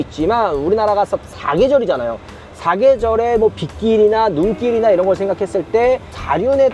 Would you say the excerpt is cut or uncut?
uncut